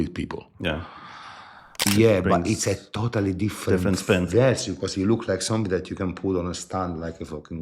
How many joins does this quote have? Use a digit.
1